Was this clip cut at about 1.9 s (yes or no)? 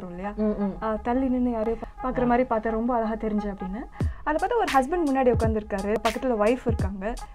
yes